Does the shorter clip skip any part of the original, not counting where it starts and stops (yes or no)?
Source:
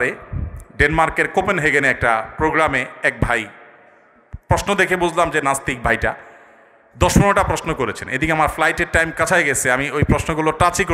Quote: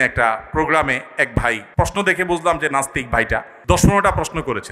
yes